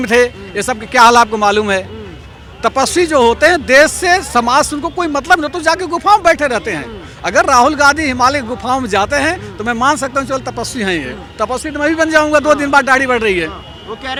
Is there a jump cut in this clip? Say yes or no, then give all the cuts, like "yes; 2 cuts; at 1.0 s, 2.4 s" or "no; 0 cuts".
no; 0 cuts